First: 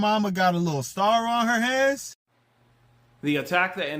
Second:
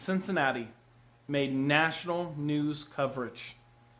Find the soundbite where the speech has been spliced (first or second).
first